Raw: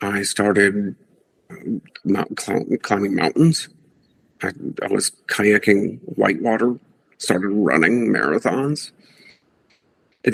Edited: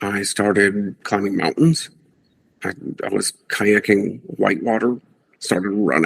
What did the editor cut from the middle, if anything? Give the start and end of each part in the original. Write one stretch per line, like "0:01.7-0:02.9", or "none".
0:01.0-0:02.8